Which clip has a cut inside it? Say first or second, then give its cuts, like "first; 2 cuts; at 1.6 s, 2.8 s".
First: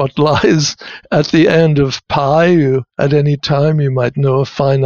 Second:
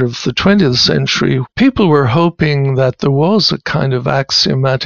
second; 1 cut; at 1.4 s